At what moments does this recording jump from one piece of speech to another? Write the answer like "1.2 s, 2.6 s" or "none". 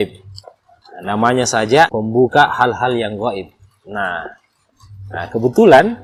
none